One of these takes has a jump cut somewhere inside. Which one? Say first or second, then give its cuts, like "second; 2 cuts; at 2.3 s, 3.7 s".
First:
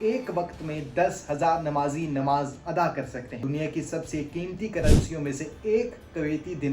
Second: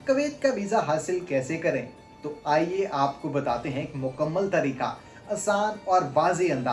first; 1 cut; at 3.3 s